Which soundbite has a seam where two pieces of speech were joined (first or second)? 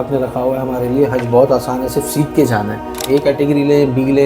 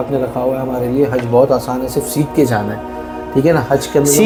first